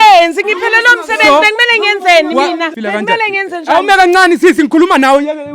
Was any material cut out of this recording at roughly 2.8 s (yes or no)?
yes